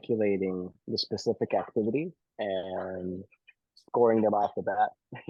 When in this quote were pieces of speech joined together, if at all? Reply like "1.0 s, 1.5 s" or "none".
none